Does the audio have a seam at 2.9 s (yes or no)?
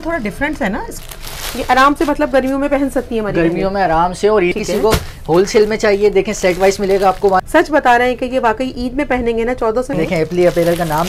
no